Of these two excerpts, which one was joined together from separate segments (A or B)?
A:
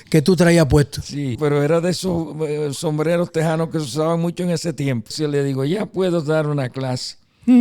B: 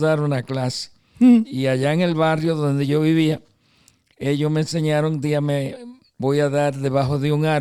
A